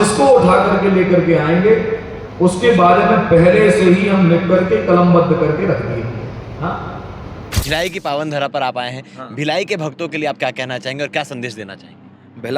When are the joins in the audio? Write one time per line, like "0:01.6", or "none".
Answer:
0:07.6